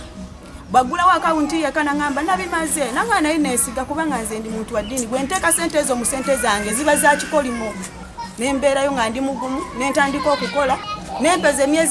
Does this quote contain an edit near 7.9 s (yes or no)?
yes